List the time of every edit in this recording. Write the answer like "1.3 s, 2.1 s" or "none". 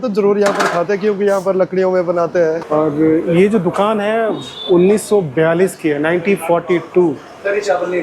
2.6 s